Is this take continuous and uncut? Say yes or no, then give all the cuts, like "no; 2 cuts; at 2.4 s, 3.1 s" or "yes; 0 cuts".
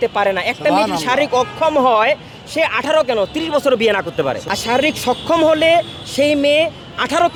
yes; 0 cuts